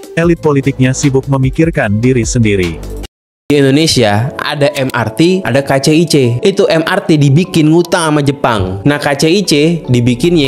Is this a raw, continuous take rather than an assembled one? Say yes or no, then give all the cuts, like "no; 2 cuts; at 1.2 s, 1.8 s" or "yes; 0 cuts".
no; 1 cut; at 3.5 s